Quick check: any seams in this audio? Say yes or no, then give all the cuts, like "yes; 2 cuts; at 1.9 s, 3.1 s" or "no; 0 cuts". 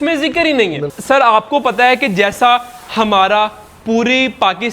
yes; 1 cut; at 0.9 s